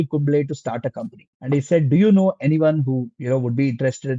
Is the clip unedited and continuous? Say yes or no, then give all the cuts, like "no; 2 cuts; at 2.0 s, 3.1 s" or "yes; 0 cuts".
yes; 0 cuts